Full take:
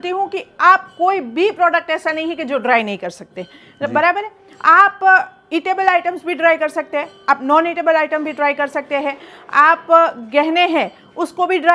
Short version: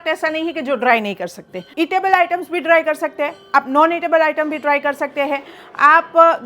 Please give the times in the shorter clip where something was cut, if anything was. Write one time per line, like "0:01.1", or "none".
0:01.6